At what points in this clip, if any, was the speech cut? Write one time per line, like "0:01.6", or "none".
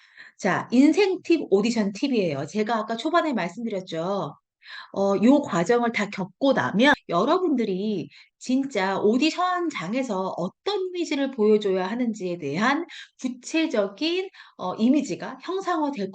0:07.0